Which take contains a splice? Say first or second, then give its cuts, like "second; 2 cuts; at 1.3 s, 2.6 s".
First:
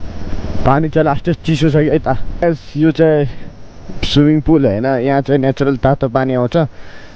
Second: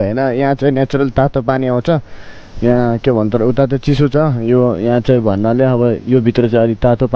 first; 1 cut; at 2.3 s